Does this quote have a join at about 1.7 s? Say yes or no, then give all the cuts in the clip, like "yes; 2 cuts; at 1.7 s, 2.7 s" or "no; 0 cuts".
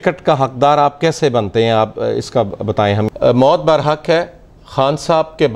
no; 1 cut; at 3.0 s